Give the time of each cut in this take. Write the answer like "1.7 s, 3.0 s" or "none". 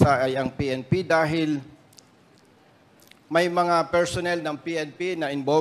none